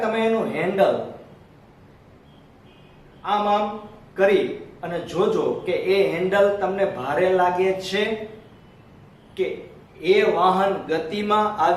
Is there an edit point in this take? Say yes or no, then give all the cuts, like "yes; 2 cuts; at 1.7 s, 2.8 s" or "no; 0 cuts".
no; 0 cuts